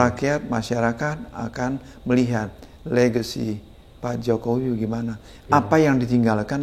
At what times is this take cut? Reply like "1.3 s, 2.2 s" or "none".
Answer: none